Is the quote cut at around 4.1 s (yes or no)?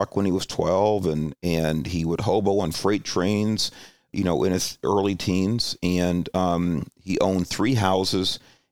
yes